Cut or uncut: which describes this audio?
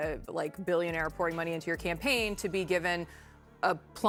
uncut